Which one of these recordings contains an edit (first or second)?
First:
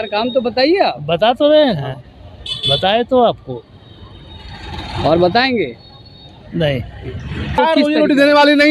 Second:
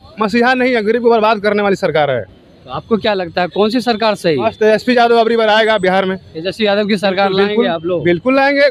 first